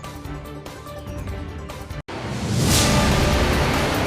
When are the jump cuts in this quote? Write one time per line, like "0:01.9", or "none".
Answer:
0:00.9
0:02.0